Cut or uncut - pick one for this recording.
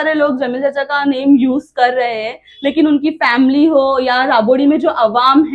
uncut